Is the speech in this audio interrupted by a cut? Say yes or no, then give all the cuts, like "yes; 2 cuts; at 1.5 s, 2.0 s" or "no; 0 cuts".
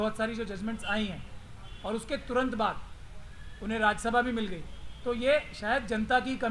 no; 0 cuts